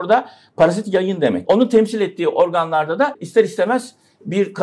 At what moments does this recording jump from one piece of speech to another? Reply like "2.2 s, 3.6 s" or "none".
1.4 s, 3.2 s